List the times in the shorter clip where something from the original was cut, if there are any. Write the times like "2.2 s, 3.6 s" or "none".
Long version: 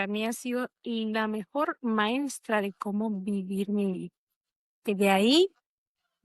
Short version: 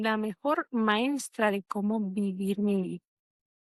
none